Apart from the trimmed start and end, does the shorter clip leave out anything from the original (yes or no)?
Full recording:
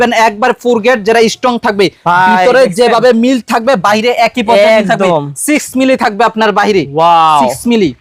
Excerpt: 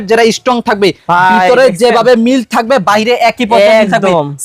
no